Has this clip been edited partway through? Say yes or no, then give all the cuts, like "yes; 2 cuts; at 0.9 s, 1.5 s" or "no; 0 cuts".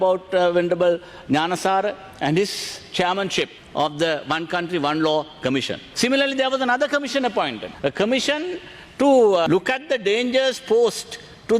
yes; 4 cuts; at 3.6 s, 5.8 s, 7.6 s, 9.5 s